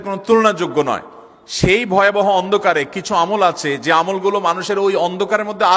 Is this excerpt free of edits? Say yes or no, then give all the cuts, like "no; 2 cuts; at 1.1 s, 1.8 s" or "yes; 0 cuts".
yes; 0 cuts